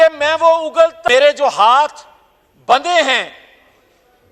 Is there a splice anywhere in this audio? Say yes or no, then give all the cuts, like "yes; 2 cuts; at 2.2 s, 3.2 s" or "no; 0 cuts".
yes; 1 cut; at 1.0 s